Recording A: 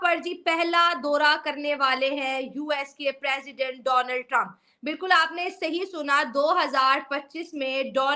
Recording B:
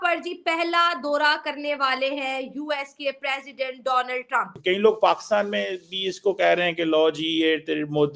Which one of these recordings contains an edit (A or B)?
B